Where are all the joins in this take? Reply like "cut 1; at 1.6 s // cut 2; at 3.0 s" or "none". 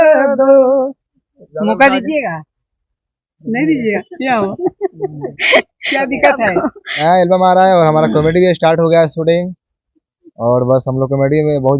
cut 1; at 7.0 s